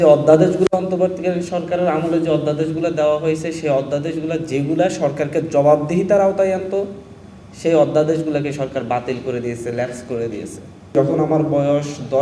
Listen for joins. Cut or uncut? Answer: cut